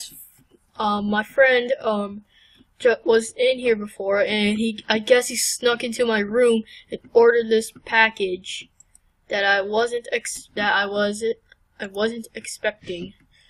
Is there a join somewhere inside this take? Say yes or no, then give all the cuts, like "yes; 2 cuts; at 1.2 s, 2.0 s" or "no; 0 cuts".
yes; 1 cut; at 4.6 s